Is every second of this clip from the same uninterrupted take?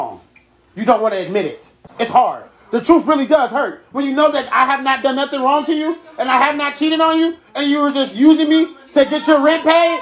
no; 1 cut; at 1.8 s

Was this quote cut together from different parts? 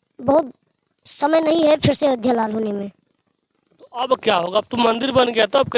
no; 0 cuts

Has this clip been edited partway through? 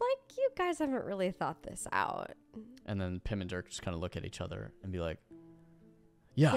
no; 0 cuts

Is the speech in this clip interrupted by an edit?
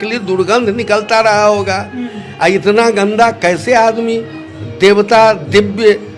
no; 0 cuts

